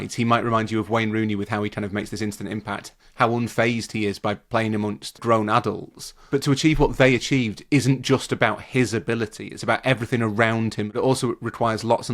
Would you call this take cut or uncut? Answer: cut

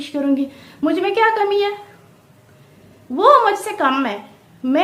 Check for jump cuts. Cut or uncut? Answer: uncut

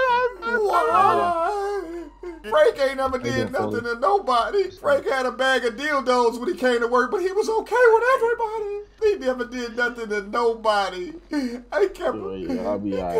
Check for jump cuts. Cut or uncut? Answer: cut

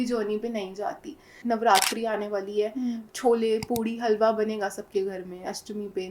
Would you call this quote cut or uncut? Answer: cut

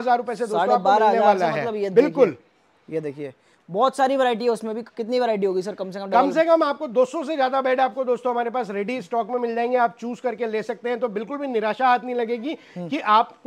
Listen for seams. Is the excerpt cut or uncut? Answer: uncut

